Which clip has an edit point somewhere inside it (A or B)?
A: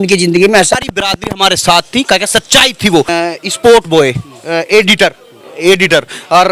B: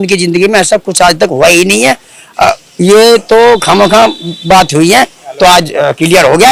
A